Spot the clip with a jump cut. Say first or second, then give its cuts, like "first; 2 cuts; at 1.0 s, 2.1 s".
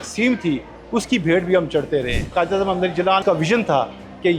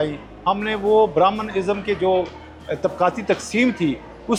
first; 2 cuts; at 2.2 s, 3.2 s